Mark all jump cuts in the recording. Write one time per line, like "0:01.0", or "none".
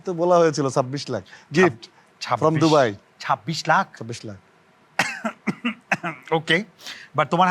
none